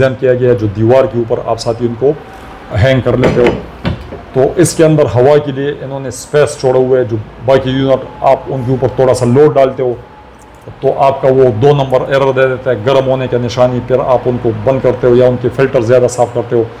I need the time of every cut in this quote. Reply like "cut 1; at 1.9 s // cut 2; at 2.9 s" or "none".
none